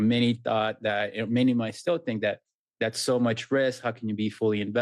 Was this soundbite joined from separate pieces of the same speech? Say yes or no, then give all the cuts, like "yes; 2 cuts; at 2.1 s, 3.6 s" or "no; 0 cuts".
no; 0 cuts